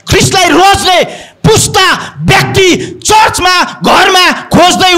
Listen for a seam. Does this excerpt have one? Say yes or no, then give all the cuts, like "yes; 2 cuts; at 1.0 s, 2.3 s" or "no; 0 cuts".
no; 0 cuts